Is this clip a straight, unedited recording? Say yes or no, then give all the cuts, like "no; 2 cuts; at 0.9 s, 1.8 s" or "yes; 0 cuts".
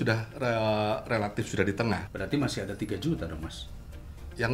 no; 1 cut; at 2.1 s